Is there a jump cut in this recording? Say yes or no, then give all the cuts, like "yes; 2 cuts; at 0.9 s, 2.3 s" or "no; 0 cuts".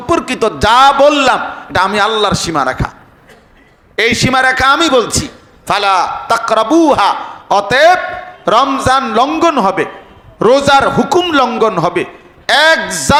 no; 0 cuts